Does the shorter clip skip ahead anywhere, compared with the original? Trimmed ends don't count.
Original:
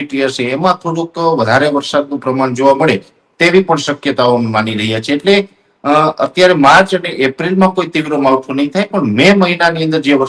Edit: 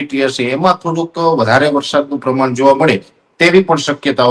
no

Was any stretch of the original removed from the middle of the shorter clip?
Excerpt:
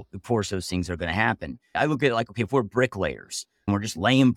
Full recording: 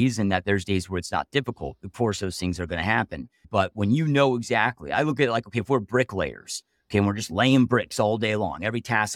yes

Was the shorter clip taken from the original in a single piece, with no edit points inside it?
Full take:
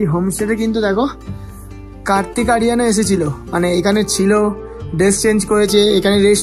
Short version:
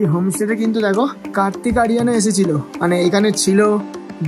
no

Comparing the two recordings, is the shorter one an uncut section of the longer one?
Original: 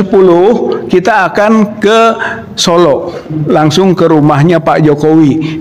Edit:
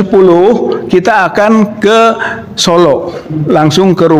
yes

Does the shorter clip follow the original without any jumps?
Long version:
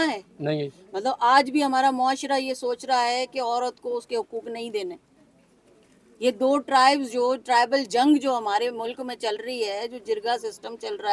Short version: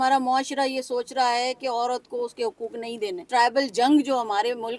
no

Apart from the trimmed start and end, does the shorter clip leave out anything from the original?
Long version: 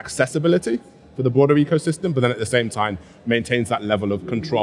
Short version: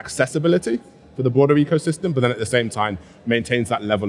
no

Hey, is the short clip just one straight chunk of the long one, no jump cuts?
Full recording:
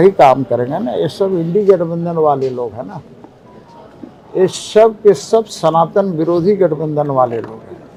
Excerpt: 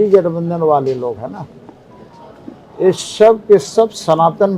yes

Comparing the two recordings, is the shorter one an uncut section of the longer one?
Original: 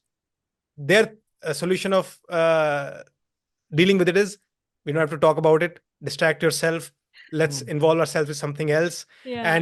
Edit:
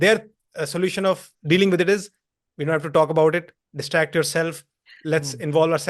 no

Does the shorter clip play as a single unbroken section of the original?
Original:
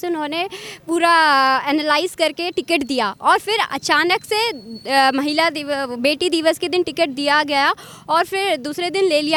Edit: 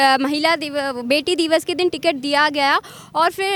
yes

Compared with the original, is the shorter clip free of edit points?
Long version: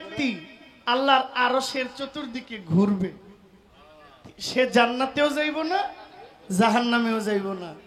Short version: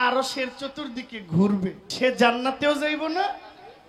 no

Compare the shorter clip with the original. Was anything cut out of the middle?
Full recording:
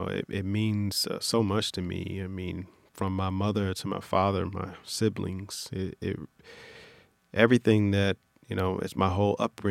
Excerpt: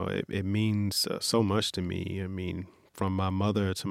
no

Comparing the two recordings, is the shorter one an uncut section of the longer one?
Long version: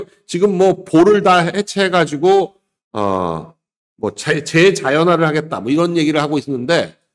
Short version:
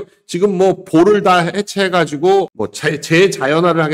no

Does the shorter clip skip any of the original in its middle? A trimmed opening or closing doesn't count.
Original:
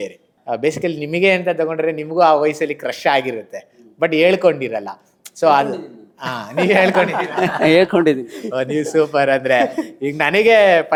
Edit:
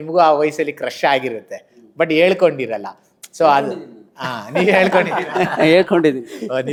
no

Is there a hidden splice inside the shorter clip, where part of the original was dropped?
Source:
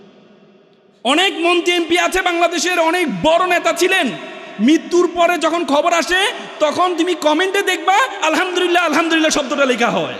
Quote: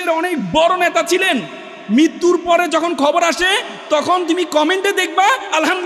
no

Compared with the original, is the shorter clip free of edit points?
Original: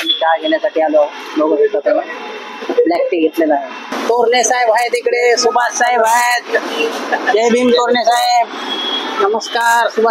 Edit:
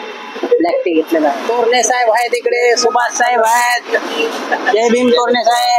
no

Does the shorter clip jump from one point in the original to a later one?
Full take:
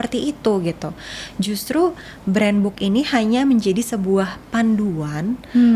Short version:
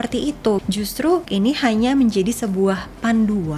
yes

